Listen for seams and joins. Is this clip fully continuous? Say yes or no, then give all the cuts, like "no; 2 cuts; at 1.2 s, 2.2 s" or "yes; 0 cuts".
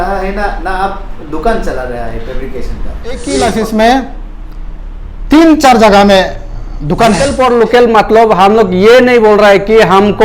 no; 2 cuts; at 3.3 s, 7.2 s